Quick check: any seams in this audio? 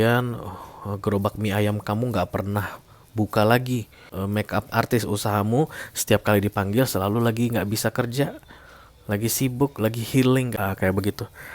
yes; 2 cuts; at 4.0 s, 10.5 s

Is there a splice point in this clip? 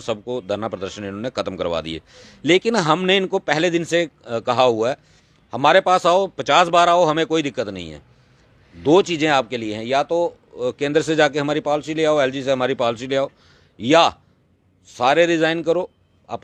no; 0 cuts

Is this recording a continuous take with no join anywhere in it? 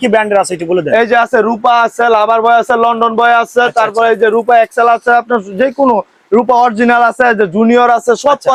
yes; 0 cuts

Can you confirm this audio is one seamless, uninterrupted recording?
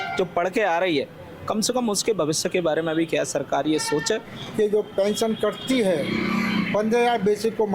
no; 1 cut; at 4.3 s

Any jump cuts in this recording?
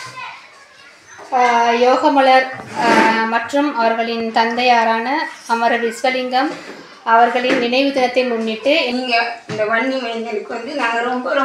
yes; 1 cut; at 8.9 s

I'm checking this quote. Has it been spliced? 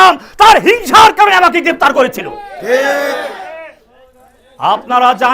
no; 0 cuts

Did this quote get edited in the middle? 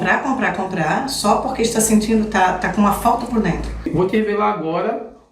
yes; 1 cut; at 3.9 s

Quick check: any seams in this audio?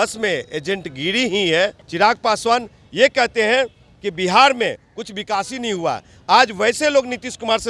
yes; 1 cut; at 1.8 s

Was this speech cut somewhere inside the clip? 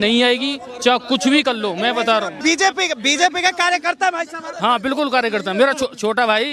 yes; 1 cut; at 2.4 s

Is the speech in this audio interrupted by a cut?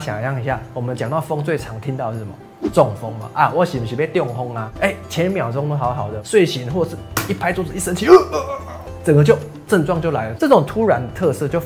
yes; 3 cuts; at 4.6 s, 6.2 s, 10.3 s

